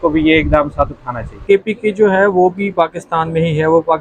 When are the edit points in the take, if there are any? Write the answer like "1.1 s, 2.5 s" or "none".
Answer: 1.4 s